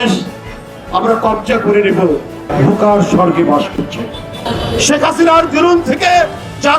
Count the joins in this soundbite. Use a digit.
2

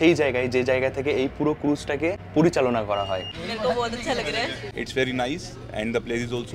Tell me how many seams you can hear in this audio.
3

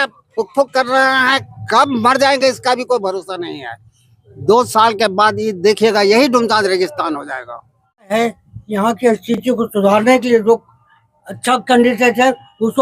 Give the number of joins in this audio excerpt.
1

